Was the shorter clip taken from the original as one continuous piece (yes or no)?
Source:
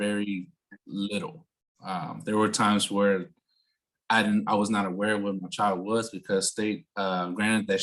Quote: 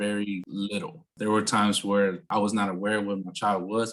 no